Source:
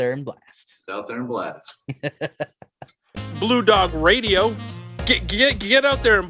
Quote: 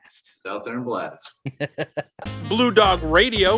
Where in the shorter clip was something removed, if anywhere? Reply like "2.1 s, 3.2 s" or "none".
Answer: 2.2 s